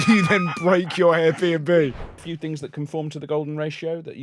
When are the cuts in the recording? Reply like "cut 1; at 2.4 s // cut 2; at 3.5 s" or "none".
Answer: cut 1; at 2.2 s